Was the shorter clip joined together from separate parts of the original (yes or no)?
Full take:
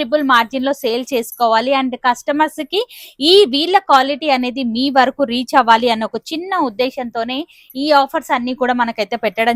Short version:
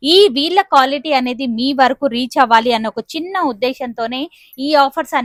no